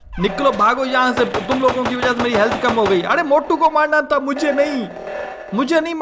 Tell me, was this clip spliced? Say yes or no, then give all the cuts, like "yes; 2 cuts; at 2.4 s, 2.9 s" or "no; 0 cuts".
no; 0 cuts